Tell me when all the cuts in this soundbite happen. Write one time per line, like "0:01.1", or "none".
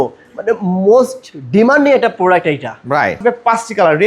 0:03.2

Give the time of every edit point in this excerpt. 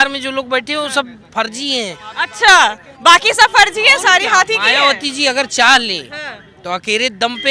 none

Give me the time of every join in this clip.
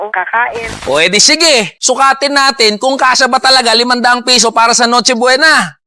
0:02.2

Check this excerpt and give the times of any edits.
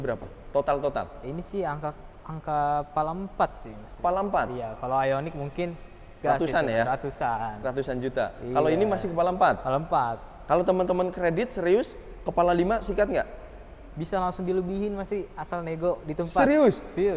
none

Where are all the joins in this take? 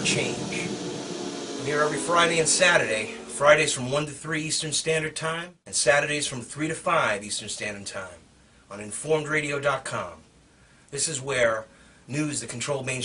none

